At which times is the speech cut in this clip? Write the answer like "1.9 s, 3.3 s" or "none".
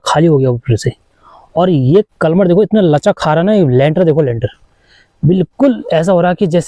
none